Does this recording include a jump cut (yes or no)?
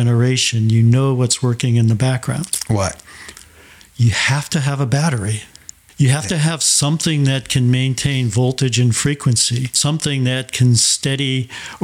yes